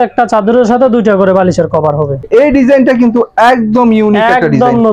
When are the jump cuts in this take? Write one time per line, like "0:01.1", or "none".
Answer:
0:02.2